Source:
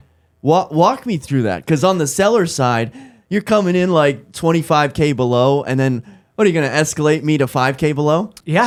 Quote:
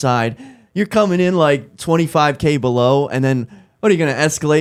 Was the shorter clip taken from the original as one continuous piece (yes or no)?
yes